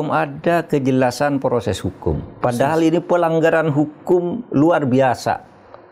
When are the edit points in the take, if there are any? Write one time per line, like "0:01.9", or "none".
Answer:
none